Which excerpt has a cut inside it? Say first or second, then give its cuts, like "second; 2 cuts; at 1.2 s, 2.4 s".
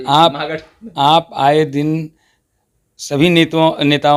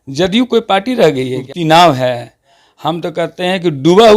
second; 1 cut; at 1.4 s